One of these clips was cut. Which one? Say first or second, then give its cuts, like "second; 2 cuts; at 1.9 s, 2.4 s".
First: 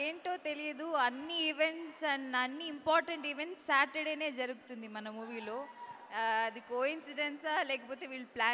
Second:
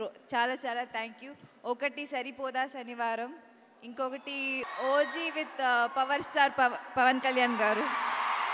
second; 1 cut; at 4.7 s